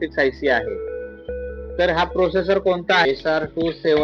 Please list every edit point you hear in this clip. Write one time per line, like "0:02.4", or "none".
0:03.0